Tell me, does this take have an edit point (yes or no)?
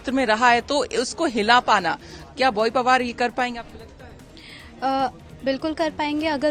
no